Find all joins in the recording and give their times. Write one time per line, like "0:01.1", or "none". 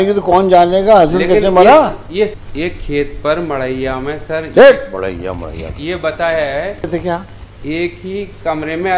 0:02.3
0:06.9